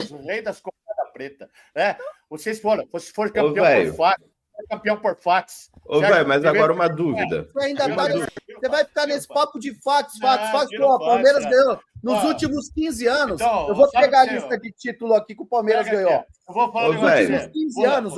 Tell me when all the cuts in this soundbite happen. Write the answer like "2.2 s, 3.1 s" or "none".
8.4 s